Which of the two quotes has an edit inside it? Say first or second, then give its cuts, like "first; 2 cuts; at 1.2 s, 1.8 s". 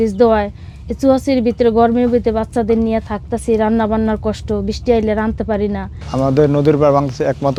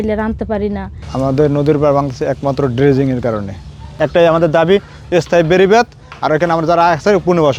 second; 1 cut; at 3.9 s